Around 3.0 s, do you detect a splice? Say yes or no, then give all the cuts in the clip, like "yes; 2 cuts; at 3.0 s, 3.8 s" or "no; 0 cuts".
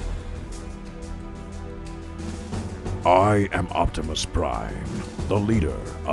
yes; 1 cut; at 3.0 s